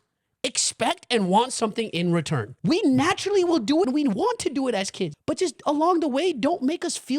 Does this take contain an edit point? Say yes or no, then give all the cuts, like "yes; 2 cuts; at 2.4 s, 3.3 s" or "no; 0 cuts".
yes; 3 cuts; at 2.5 s, 3.9 s, 5.1 s